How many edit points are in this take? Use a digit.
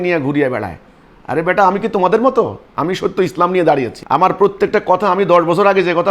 2